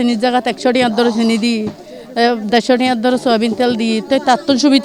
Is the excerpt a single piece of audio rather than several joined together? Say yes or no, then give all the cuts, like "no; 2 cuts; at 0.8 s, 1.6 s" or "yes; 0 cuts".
yes; 0 cuts